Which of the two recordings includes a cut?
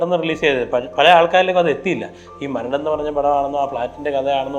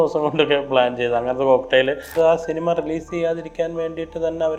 second; 1 cut; at 2.1 s

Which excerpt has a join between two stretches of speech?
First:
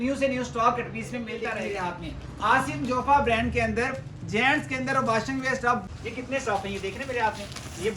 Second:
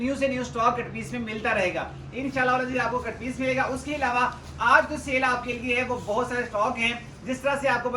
first; 2 cuts; at 1.4 s, 5.8 s

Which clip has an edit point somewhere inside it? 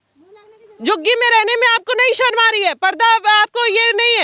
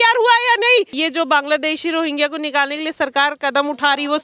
second; 1 cut; at 0.9 s

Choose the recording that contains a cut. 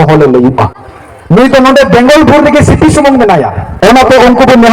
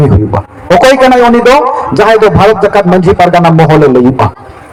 first; 1 cut; at 3.6 s

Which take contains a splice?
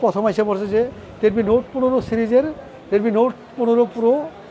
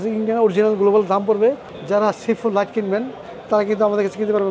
second; 1 cut; at 1.7 s

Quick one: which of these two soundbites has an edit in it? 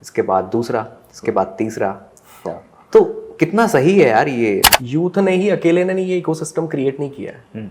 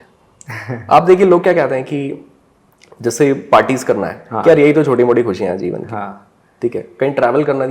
first; 1 cut; at 4.7 s

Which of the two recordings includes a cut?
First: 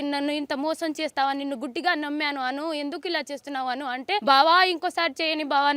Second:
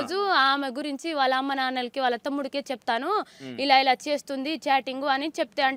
first; 1 cut; at 4.2 s

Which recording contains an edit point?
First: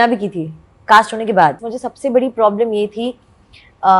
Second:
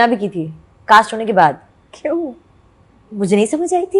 first; 1 cut; at 1.7 s

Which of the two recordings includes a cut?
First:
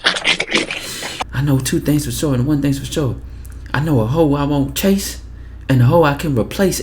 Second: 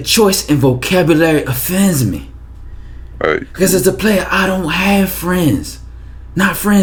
first; 1 cut; at 1.3 s

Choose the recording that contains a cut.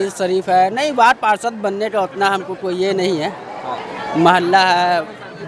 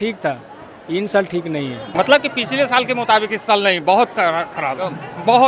second; 1 cut; at 1.9 s

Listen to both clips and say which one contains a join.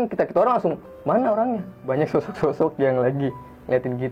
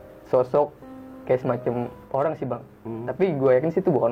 first; 1 cut; at 1.7 s

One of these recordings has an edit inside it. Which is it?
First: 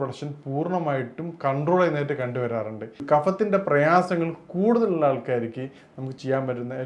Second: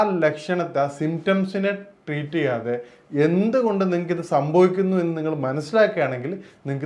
first; 1 cut; at 2.9 s

